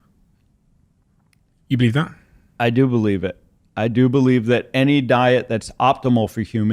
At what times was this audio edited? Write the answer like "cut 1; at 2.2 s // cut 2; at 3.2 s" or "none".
none

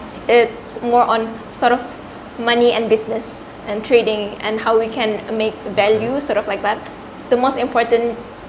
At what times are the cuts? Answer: cut 1; at 1.4 s // cut 2; at 7.1 s

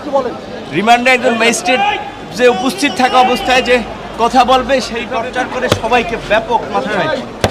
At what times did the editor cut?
cut 1; at 5.0 s

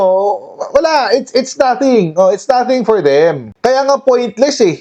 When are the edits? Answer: none

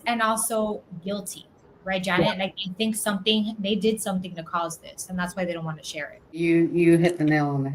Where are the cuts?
cut 1; at 6.2 s

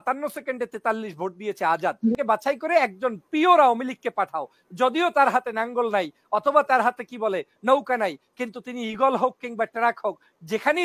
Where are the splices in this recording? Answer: cut 1; at 2.1 s

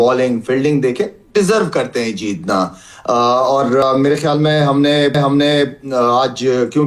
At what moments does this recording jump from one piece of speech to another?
none

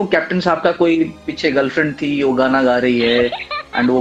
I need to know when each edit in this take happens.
none

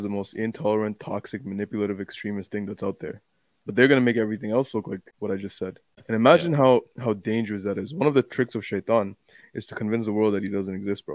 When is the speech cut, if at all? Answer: cut 1; at 5.1 s // cut 2; at 5.9 s

